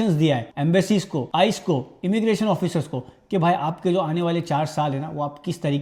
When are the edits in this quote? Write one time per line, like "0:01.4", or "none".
none